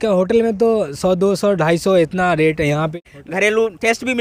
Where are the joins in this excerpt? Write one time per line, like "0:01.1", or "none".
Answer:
0:02.9